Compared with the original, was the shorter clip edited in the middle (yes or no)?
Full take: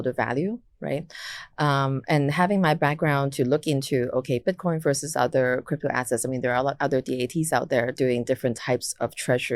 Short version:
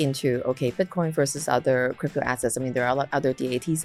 no